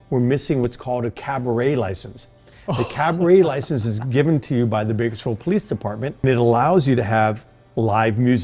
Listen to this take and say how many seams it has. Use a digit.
1